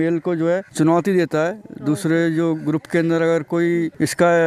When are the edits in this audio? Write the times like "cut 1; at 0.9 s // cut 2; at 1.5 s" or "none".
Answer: none